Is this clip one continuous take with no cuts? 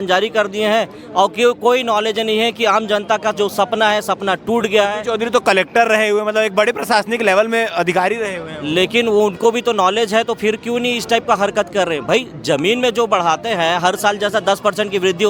yes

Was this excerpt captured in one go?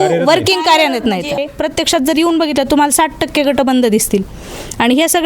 no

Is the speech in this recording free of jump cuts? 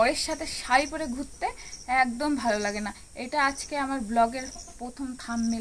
yes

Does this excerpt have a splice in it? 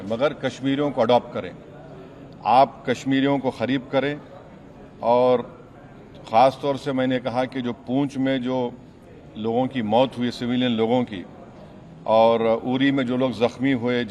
no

